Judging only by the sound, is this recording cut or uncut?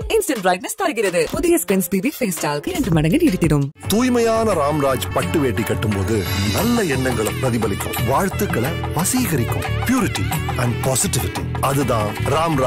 uncut